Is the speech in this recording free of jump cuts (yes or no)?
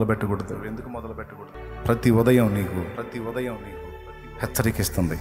no